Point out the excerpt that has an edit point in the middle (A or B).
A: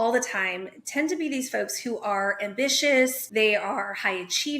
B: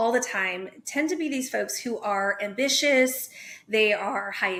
A